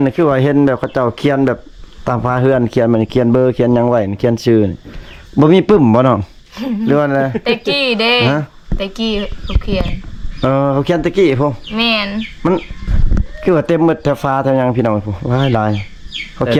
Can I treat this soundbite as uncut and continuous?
yes; 0 cuts

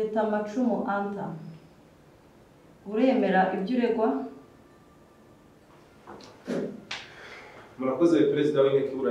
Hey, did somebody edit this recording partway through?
no; 0 cuts

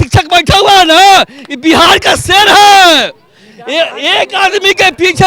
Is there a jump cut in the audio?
no; 0 cuts

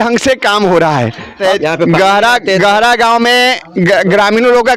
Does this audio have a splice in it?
yes; 1 cut; at 1.4 s

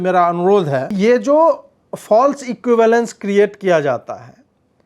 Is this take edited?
yes; 1 cut; at 0.9 s

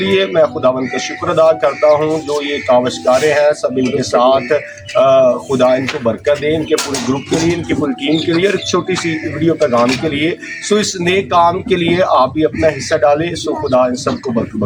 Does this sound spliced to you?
no; 0 cuts

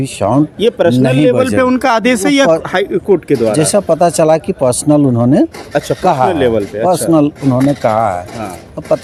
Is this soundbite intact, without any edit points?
yes; 0 cuts

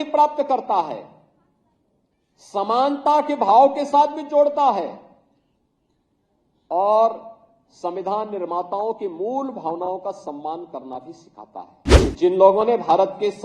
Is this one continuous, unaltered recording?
no; 1 cut; at 11.8 s

